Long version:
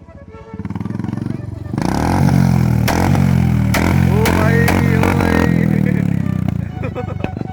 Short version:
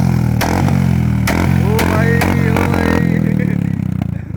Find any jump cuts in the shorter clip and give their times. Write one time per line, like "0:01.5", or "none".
none